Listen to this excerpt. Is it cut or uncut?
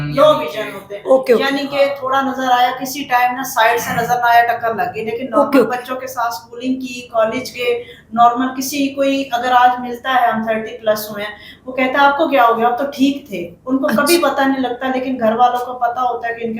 uncut